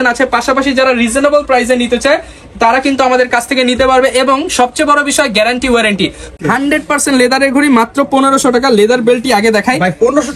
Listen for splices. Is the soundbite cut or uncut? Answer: cut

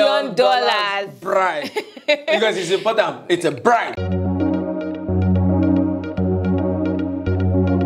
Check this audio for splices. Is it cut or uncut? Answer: cut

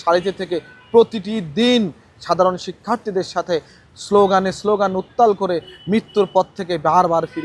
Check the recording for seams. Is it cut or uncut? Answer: uncut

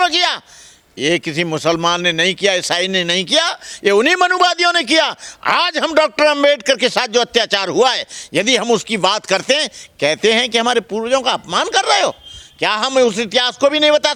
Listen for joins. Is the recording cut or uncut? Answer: uncut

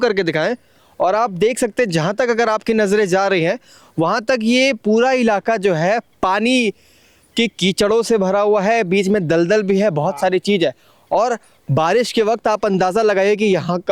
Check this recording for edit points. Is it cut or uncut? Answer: uncut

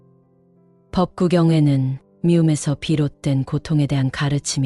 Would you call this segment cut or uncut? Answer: uncut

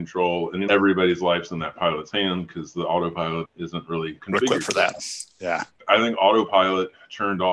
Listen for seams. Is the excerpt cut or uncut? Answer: uncut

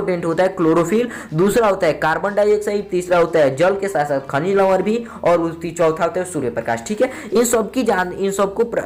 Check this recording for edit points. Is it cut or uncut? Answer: uncut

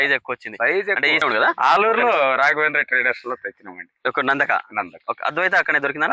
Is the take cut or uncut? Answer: uncut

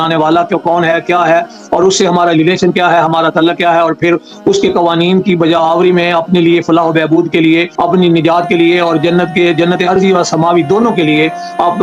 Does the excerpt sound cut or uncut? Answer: uncut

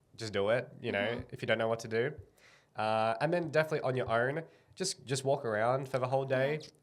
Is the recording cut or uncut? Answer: uncut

